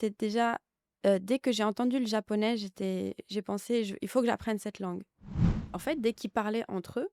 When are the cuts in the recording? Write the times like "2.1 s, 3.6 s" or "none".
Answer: 5.4 s